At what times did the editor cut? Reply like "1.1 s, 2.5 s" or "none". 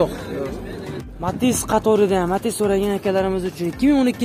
1.0 s